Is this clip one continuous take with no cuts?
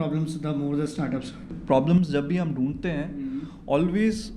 no; 1 cut; at 1.5 s

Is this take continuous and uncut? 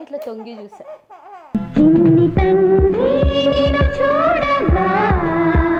yes; 0 cuts

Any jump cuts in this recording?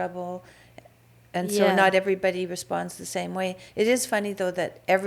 no; 0 cuts

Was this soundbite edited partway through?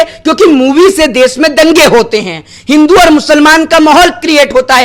no; 0 cuts

